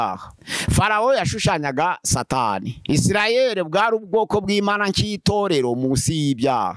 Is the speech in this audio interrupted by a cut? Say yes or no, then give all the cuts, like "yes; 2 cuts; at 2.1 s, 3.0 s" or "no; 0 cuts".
no; 0 cuts